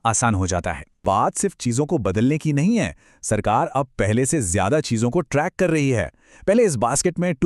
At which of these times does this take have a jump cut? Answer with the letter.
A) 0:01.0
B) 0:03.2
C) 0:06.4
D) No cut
A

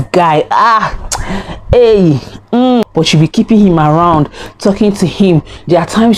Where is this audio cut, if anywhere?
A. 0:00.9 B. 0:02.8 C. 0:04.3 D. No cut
B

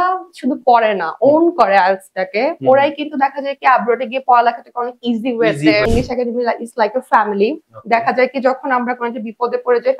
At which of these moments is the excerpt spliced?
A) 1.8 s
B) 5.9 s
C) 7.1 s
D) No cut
B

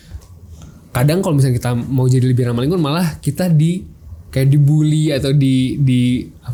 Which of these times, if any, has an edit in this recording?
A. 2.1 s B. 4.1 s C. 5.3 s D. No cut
D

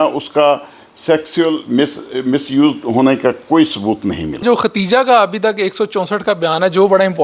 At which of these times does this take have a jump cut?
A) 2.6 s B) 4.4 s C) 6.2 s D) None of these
B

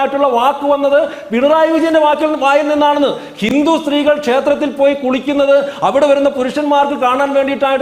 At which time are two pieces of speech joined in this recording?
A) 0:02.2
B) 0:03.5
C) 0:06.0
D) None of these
B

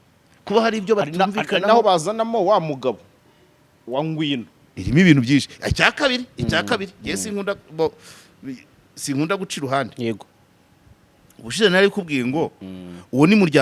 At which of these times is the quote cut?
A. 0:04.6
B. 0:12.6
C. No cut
A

